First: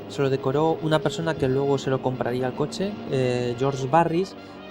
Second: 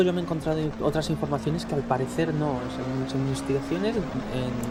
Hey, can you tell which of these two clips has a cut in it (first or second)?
first